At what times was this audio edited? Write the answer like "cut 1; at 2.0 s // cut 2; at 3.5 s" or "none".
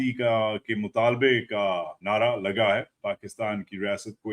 cut 1; at 2.9 s